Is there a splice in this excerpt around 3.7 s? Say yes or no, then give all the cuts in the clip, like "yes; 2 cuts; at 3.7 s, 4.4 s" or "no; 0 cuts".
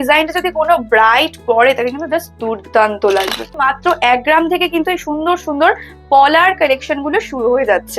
yes; 1 cut; at 3.7 s